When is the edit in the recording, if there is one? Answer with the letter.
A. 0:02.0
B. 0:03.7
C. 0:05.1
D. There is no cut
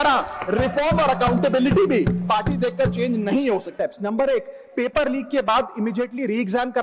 B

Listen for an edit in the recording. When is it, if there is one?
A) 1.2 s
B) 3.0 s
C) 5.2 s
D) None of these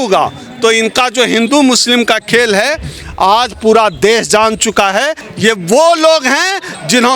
C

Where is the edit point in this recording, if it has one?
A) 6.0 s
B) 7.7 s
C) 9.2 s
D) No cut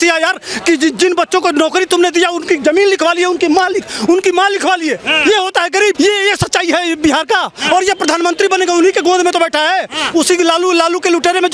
A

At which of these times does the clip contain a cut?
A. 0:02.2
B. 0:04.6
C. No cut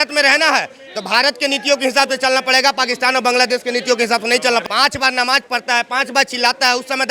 B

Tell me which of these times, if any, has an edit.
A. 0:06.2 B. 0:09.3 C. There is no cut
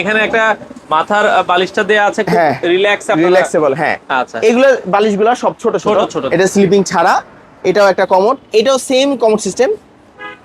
A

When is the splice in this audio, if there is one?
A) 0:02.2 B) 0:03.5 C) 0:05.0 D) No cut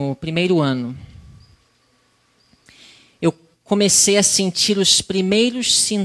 D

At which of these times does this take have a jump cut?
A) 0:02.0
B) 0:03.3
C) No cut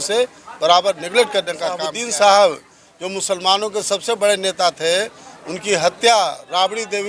A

